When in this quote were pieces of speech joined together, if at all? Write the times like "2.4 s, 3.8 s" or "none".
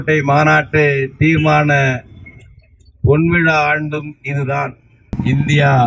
4.9 s